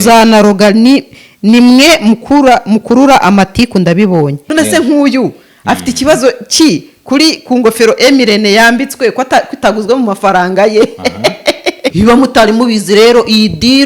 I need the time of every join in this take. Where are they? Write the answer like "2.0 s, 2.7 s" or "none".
4.4 s, 11.9 s